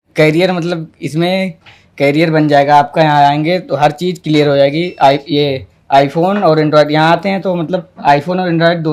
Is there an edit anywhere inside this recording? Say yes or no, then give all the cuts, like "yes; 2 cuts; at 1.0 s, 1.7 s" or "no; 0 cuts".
no; 0 cuts